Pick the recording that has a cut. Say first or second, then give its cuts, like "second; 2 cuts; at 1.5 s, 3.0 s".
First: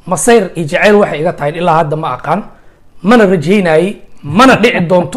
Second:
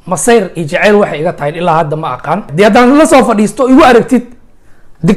second; 1 cut; at 2.5 s